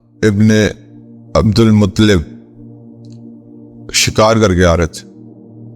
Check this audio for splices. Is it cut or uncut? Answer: cut